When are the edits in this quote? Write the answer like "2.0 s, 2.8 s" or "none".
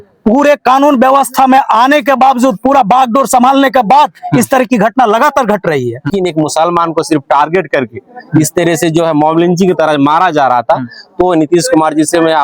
6.0 s